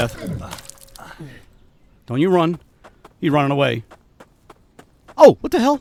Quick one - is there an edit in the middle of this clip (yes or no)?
no